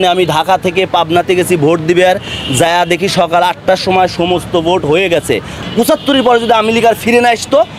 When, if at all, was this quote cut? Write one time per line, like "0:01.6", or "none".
0:05.6